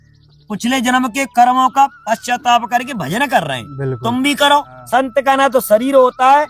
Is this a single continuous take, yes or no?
no